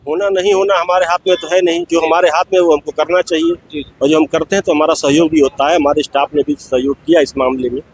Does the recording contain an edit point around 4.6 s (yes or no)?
no